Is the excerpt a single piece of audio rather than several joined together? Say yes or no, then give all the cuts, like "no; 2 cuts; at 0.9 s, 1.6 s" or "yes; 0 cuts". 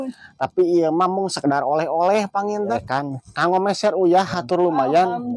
no; 1 cut; at 2.7 s